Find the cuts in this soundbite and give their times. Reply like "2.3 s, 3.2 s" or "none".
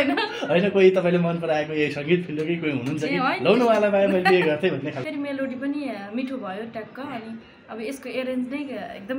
5.0 s